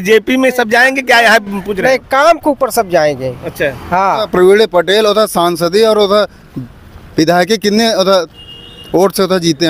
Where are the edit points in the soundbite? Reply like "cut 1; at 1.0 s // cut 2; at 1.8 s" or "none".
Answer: cut 1; at 4.3 s